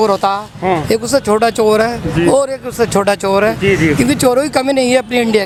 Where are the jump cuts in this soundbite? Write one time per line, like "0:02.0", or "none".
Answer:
none